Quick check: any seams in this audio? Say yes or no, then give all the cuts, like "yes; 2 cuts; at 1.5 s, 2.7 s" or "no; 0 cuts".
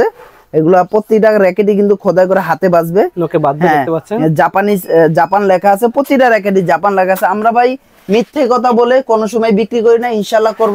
no; 0 cuts